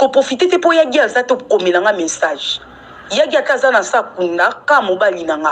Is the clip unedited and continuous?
no; 1 cut; at 1.1 s

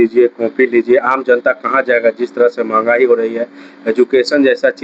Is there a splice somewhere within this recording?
no; 0 cuts

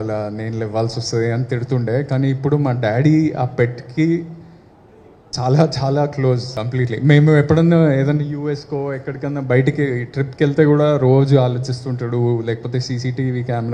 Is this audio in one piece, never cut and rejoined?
no; 1 cut; at 6.6 s

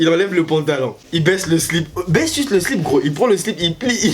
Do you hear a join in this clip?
yes; 1 cut; at 1.0 s

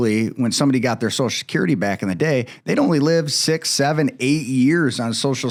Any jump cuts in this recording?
no; 0 cuts

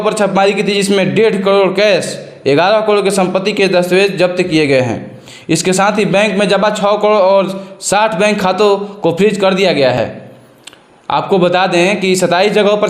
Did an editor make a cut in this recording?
no; 0 cuts

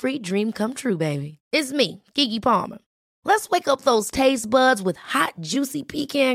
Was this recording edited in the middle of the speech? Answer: no; 0 cuts

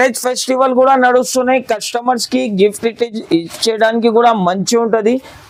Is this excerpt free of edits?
yes; 0 cuts

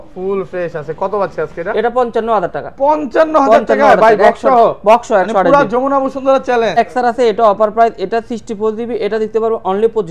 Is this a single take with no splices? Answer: no; 1 cut; at 6.8 s

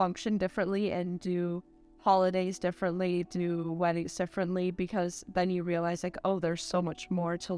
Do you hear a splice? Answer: no; 0 cuts

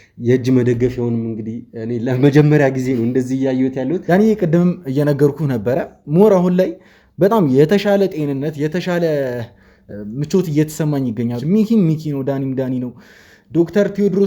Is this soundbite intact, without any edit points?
no; 2 cuts; at 4.0 s, 11.4 s

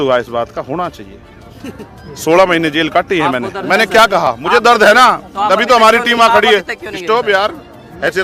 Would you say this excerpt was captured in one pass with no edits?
yes; 0 cuts

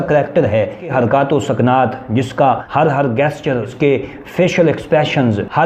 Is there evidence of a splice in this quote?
yes; 3 cuts; at 0.9 s, 2.6 s, 3.7 s

